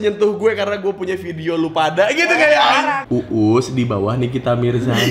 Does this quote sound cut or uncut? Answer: cut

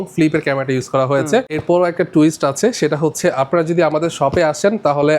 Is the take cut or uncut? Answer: cut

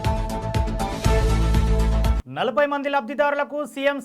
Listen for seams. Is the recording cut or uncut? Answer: cut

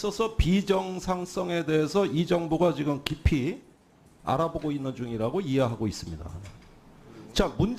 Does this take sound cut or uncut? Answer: cut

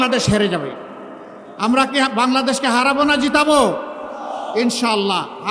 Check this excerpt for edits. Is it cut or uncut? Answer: uncut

